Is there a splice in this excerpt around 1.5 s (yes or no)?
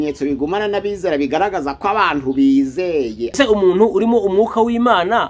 no